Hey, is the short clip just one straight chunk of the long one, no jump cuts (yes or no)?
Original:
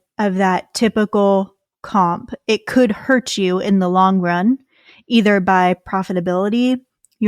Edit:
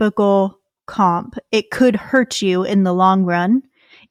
yes